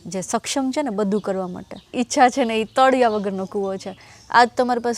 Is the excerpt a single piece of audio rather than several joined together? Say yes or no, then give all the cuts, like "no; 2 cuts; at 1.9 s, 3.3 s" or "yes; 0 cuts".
no; 1 cut; at 1.8 s